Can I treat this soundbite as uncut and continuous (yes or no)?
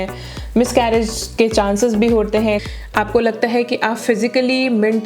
no